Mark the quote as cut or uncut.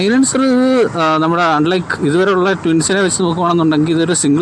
uncut